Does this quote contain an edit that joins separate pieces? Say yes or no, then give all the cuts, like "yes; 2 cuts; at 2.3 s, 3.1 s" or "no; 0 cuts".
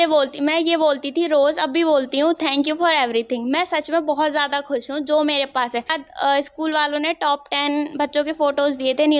yes; 1 cut; at 6.0 s